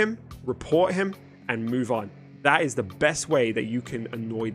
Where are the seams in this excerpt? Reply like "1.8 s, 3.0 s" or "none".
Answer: 2.3 s